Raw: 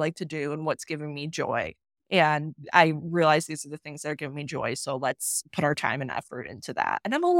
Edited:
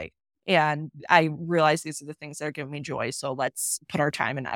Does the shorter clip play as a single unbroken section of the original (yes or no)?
yes